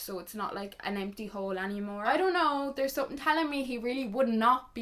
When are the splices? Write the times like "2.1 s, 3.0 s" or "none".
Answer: 2.0 s